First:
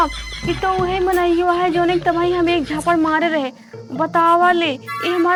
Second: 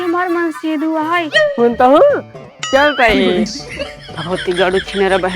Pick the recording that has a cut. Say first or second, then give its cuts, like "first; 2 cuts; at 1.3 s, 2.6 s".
second; 1 cut; at 1.4 s